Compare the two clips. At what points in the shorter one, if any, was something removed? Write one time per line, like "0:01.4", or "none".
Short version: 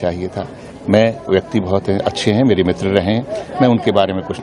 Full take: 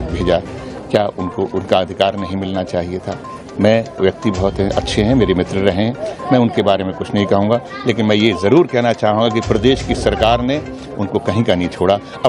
none